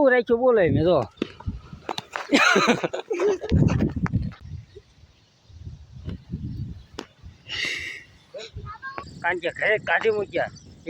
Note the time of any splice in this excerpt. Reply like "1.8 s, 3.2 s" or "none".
1.1 s, 4.4 s, 8.9 s